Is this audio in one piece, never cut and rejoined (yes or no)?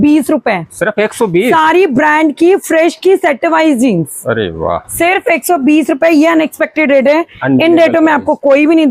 yes